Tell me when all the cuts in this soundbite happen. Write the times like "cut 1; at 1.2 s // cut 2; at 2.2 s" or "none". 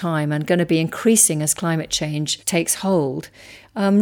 cut 1; at 2.4 s